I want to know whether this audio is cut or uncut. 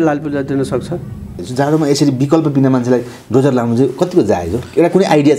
cut